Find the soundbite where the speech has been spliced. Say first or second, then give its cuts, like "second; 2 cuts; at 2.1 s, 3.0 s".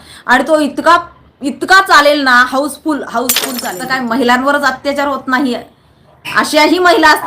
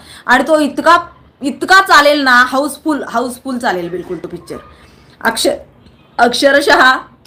first; 1 cut; at 3.7 s